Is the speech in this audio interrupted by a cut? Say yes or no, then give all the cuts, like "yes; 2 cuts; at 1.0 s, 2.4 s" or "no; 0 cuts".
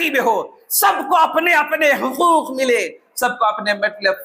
no; 0 cuts